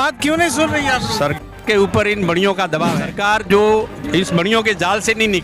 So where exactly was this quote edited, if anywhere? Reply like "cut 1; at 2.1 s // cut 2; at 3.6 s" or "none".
cut 1; at 3.0 s